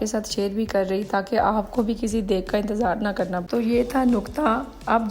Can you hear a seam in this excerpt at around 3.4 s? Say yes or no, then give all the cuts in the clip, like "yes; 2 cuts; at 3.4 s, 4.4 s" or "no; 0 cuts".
yes; 1 cut; at 3.4 s